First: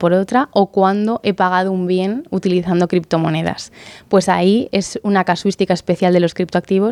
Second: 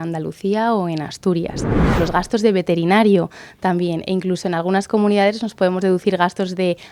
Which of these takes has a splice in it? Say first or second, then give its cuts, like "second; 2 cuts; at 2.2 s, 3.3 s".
second; 1 cut; at 1.9 s